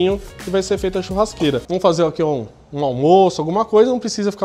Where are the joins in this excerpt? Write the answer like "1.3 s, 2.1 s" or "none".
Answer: 1.6 s